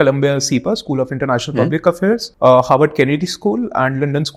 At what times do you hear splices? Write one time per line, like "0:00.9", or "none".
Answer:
none